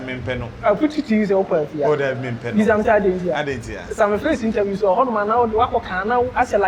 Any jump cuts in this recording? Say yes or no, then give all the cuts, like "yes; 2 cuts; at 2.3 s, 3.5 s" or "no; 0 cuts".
no; 0 cuts